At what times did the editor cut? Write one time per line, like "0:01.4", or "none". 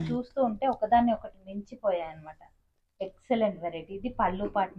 none

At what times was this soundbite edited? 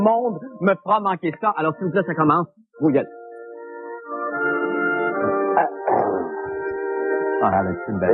0:01.5

